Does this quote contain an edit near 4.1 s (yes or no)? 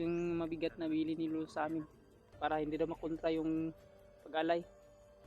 no